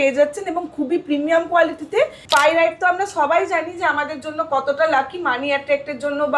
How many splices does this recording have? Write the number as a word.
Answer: one